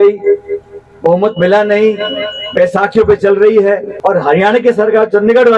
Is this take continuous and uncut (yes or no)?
no